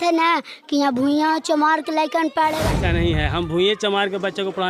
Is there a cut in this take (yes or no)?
yes